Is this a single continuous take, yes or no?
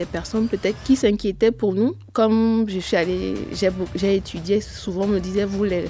no